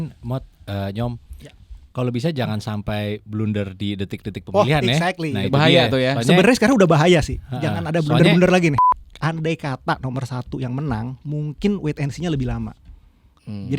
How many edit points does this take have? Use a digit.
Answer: 1